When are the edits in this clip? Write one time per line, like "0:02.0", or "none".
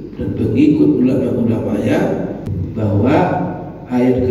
0:02.6